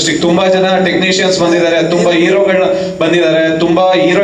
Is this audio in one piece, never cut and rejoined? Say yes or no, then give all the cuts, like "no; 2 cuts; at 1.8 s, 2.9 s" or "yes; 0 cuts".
yes; 0 cuts